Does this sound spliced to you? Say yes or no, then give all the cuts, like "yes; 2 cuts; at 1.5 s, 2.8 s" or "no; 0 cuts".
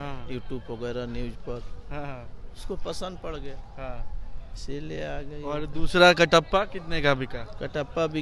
no; 0 cuts